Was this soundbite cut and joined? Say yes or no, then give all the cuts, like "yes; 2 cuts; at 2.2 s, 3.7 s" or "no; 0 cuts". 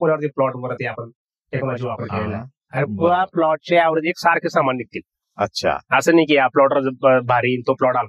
no; 0 cuts